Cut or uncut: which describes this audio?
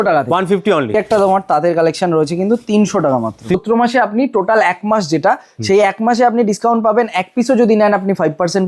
cut